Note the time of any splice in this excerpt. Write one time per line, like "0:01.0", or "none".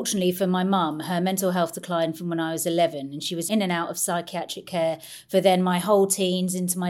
none